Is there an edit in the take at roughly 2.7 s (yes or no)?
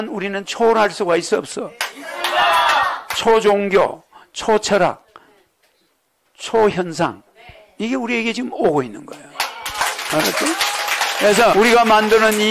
no